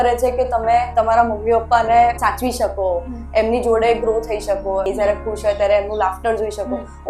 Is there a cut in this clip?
yes; 3 cuts; at 0.9 s, 2.2 s, 4.9 s

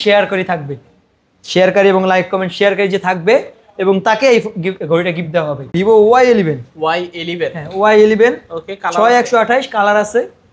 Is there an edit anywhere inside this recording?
yes; 1 cut; at 5.7 s

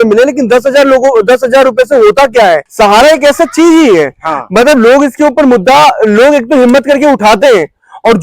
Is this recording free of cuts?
no; 1 cut; at 2.7 s

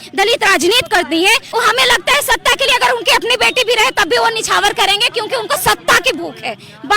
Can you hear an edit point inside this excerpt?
yes; 1 cut; at 1.5 s

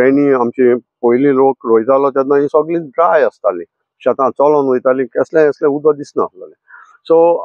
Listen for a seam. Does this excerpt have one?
no; 0 cuts

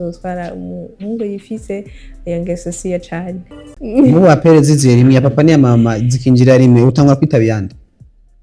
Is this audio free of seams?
no; 1 cut; at 3.6 s

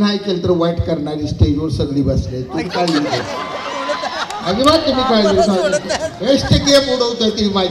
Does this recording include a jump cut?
no; 0 cuts

